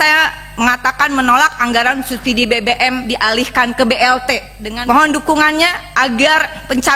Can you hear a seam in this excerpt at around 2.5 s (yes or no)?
no